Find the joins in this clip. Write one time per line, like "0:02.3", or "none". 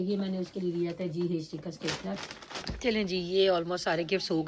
0:02.7